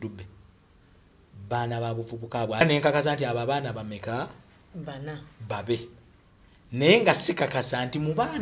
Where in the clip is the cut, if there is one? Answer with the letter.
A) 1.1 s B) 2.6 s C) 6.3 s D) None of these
B